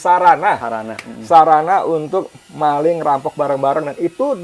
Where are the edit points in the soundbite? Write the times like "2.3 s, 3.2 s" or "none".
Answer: none